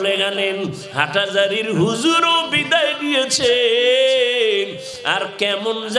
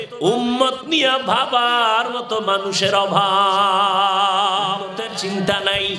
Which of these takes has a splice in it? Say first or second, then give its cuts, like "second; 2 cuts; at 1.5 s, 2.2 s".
second; 1 cut; at 5.1 s